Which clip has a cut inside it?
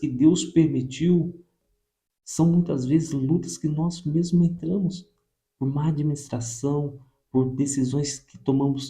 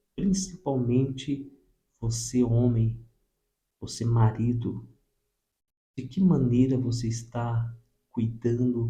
first; 1 cut; at 1.5 s

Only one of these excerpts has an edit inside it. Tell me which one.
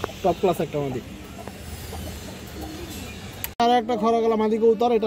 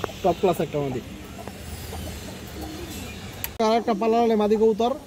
first; 1 cut; at 3.4 s

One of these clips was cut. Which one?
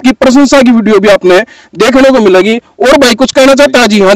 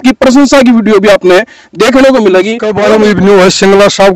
second; 1 cut; at 2.6 s

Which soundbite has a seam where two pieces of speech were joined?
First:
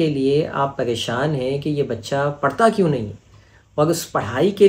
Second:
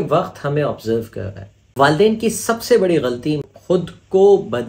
second; 2 cuts; at 1.5 s, 3.4 s

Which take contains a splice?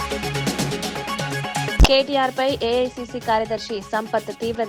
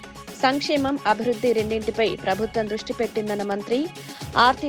first; 1 cut; at 1.7 s

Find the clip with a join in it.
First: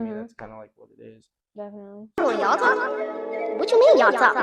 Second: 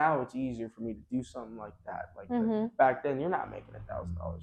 first; 1 cut; at 2.1 s

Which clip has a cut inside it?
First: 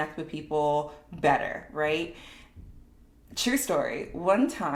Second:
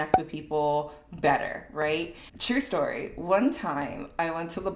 second; 1 cut; at 2.3 s

